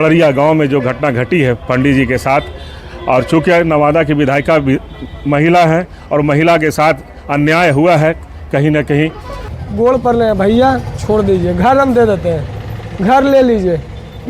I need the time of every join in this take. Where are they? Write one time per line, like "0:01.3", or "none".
0:09.6